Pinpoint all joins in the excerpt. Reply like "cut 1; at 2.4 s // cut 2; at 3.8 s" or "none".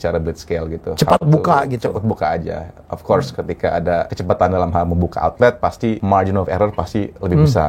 cut 1; at 4.2 s // cut 2; at 6.0 s